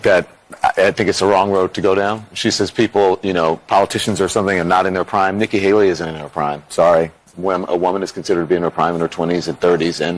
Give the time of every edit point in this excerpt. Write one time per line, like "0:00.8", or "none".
none

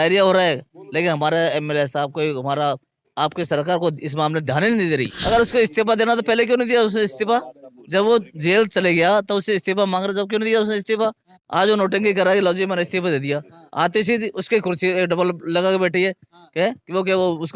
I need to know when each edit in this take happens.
0:05.1

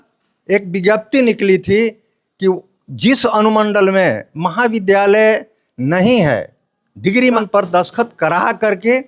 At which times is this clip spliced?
0:07.4

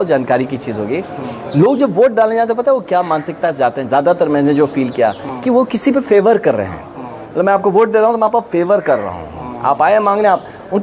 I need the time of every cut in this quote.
none

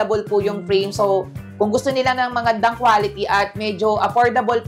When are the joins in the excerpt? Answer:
none

